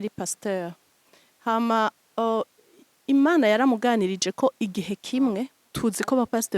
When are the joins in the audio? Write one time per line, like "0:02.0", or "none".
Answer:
0:05.6